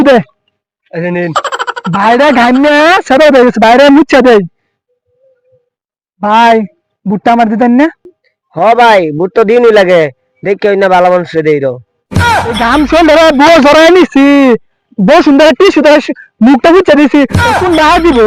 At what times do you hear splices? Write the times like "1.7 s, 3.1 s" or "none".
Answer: none